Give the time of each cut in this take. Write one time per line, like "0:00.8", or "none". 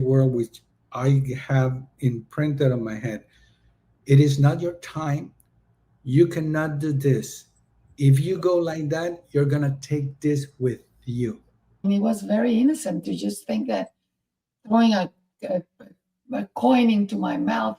0:11.8